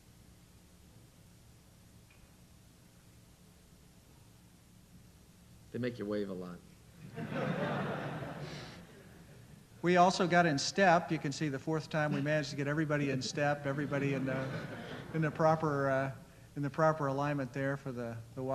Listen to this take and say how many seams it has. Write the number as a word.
one